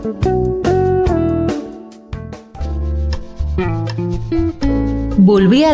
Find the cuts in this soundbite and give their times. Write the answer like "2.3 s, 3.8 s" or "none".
2.4 s